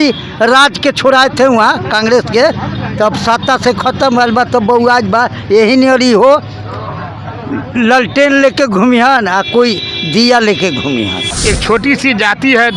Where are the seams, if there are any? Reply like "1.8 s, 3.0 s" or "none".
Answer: 11.3 s